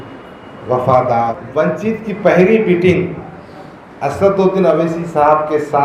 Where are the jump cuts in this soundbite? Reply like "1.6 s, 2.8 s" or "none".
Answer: 1.4 s